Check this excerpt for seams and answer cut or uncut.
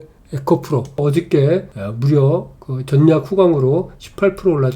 cut